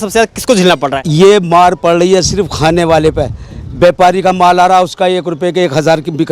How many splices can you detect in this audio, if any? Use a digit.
1